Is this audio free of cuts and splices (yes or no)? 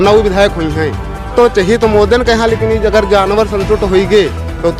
no